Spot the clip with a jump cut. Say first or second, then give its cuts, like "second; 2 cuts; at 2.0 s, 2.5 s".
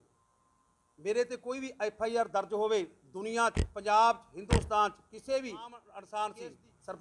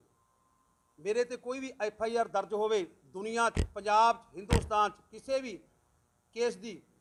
first; 1 cut; at 5.9 s